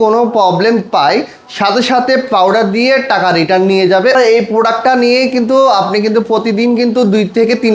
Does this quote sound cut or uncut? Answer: cut